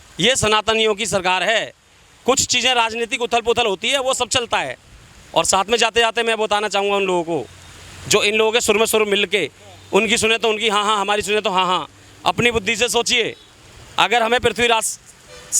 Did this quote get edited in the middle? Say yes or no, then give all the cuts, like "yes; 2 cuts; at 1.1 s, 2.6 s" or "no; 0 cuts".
no; 0 cuts